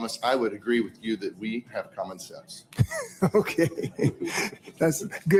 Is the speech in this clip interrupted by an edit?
no; 0 cuts

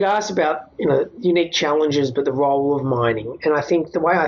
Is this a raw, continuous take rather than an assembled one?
yes; 0 cuts

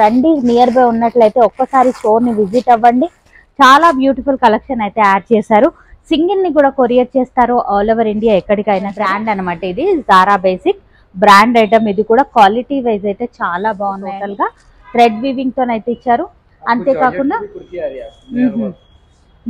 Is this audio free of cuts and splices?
no; 2 cuts; at 9.0 s, 14.1 s

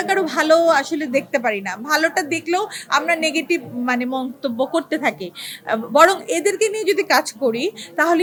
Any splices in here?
no; 0 cuts

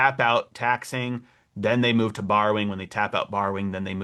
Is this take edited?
no; 0 cuts

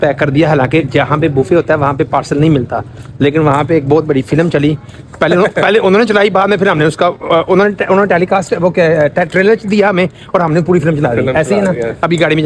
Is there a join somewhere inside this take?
no; 0 cuts

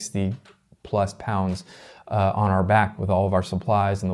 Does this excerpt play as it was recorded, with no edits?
yes; 0 cuts

